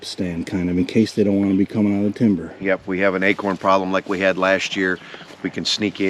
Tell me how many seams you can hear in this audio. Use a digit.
0